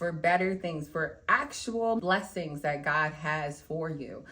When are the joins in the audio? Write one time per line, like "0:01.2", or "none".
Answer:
0:02.0